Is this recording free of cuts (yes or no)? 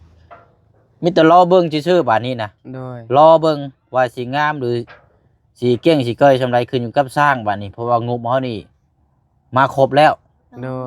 yes